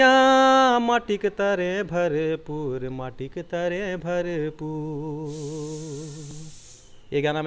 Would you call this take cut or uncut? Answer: uncut